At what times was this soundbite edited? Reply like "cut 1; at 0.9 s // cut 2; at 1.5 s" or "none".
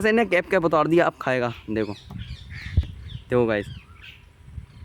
none